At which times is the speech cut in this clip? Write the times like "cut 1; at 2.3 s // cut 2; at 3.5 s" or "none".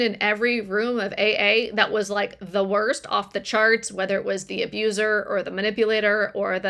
none